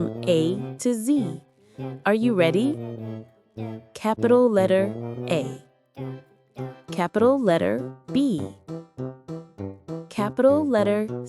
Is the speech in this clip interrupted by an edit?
yes; 4 cuts; at 5.4 s, 7.0 s, 8.4 s, 10.1 s

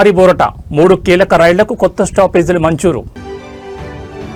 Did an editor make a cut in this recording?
no; 0 cuts

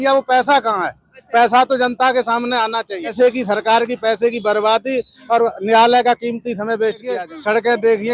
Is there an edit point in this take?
yes; 2 cuts; at 3.1 s, 7.2 s

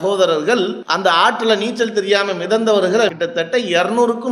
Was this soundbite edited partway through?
yes; 1 cut; at 3.1 s

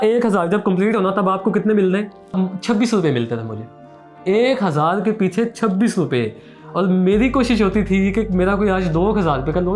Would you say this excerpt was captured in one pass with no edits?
no; 1 cut; at 2.3 s

